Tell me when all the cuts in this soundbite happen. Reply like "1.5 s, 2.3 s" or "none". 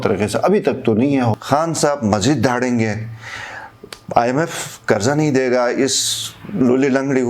1.3 s

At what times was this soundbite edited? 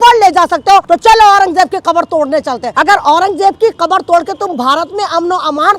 0.8 s, 2.7 s

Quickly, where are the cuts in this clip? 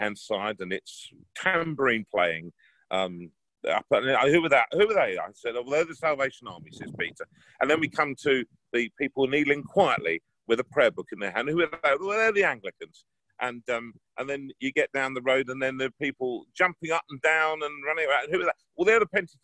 none

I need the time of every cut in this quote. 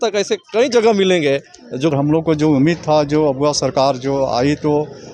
1.9 s

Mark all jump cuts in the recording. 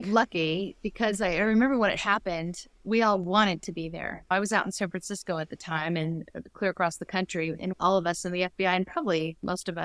2.7 s, 4.3 s, 7.7 s

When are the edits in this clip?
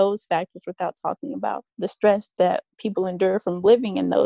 1.7 s, 2.7 s

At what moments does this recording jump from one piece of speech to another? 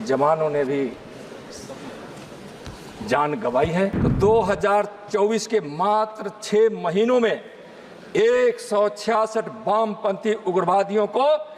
4.0 s

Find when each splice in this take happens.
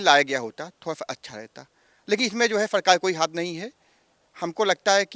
none

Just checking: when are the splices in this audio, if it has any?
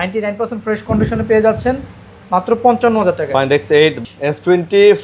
4.0 s

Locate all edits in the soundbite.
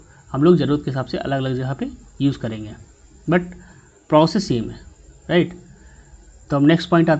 none

